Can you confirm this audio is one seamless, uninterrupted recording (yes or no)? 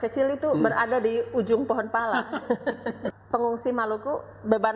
no